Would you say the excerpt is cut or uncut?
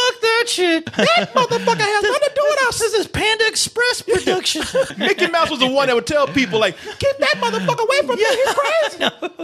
cut